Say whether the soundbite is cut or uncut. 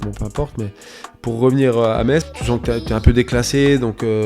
cut